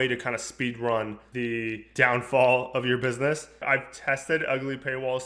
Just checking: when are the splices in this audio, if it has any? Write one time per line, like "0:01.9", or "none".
0:01.5
0:03.6